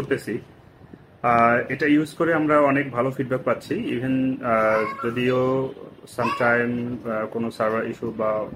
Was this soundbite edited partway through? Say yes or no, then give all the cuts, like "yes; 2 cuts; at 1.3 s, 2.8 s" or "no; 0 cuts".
no; 0 cuts